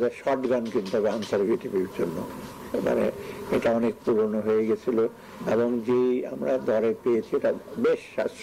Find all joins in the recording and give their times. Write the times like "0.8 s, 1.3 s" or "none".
none